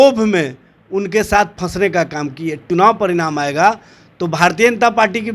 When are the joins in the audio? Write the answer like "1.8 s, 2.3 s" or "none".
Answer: 2.6 s